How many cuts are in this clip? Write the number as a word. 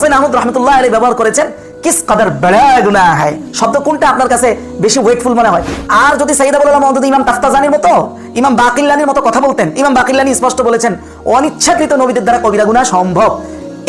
one